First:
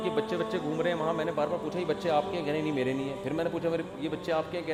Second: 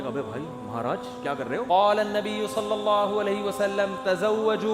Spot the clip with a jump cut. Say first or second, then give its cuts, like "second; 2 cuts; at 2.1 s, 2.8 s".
second; 1 cut; at 1.7 s